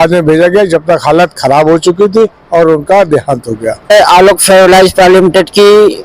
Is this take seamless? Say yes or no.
no